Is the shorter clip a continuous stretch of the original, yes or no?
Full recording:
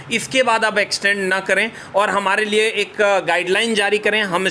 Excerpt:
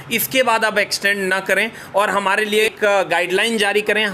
no